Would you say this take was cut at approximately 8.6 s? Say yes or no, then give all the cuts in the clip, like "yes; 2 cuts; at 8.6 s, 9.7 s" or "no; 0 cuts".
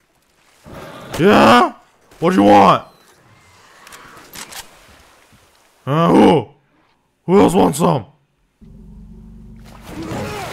yes; 1 cut; at 8.6 s